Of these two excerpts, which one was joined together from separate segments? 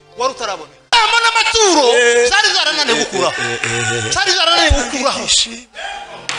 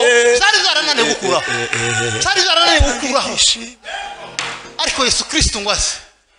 first; 1 cut; at 0.9 s

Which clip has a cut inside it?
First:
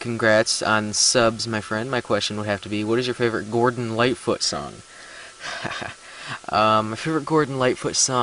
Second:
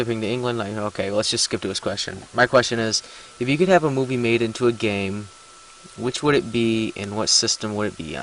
second; 1 cut; at 5.4 s

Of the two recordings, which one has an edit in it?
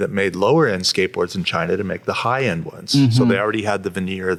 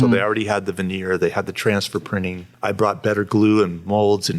second; 1 cut; at 2.4 s

